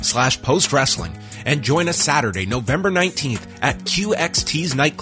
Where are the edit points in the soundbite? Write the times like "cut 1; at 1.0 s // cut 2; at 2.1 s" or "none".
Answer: none